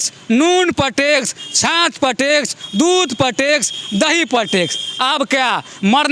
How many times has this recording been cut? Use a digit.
0